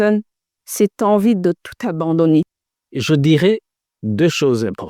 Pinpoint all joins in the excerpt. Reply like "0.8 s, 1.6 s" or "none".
2.9 s

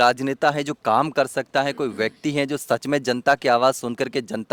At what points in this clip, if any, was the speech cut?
none

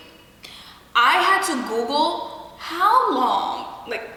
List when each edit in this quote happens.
none

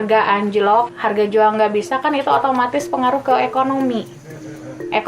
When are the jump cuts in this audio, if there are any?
0.9 s

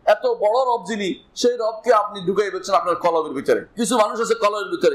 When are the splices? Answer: 3.7 s

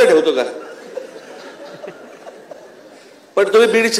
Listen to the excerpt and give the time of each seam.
none

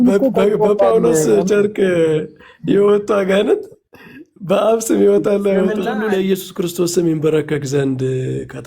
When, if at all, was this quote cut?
5.9 s

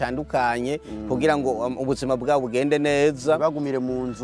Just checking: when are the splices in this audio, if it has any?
none

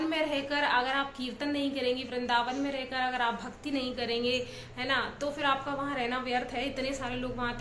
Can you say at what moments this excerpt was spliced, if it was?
none

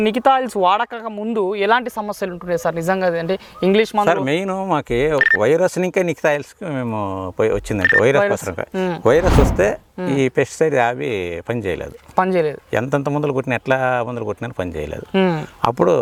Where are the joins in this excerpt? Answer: none

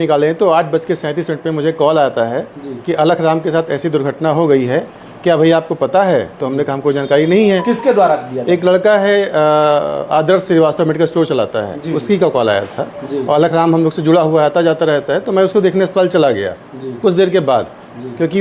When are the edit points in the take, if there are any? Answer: none

